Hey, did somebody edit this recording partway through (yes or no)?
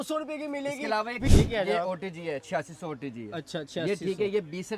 yes